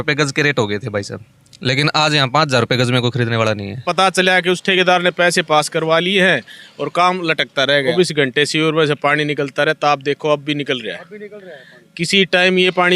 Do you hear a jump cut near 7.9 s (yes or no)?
yes